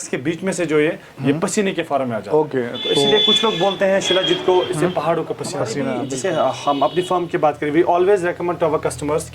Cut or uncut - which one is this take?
cut